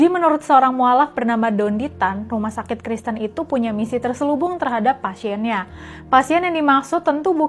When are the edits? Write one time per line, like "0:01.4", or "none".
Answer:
none